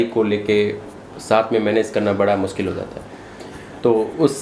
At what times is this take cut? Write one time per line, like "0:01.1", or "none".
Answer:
none